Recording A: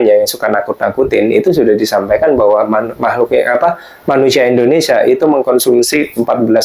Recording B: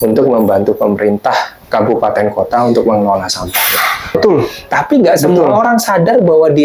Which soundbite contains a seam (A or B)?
B